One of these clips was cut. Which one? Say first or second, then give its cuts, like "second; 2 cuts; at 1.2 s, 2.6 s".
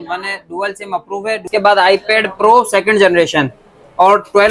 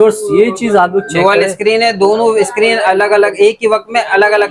first; 1 cut; at 1.5 s